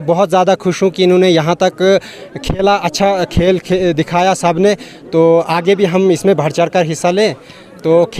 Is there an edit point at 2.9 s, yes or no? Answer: no